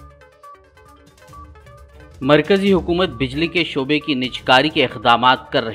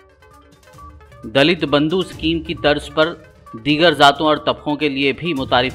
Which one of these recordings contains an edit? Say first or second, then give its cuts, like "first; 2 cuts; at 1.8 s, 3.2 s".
first; 1 cut; at 1.2 s